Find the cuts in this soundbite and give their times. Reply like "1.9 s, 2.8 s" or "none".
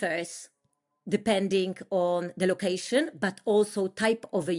none